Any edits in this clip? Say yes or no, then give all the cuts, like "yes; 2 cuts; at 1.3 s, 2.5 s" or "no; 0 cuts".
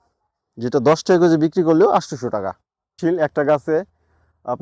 yes; 1 cut; at 3.0 s